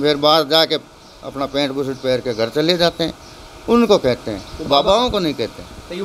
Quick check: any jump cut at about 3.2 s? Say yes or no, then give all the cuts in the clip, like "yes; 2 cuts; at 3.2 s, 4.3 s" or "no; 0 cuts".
no; 0 cuts